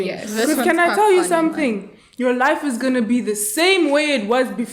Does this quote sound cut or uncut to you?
uncut